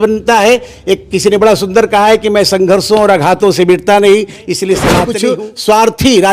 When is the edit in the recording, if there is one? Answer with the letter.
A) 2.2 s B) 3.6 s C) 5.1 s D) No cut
C